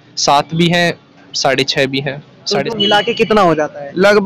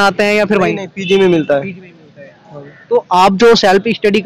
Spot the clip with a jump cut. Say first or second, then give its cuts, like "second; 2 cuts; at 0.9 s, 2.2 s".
first; 1 cut; at 2.6 s